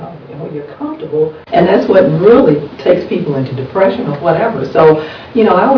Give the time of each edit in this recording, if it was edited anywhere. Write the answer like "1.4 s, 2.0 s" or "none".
1.4 s